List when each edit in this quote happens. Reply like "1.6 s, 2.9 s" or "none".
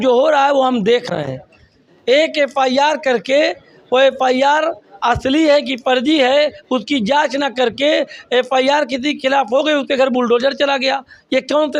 none